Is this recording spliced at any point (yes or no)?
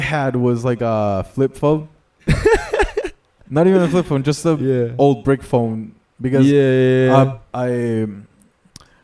no